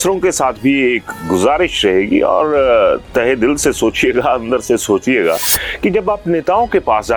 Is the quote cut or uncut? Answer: uncut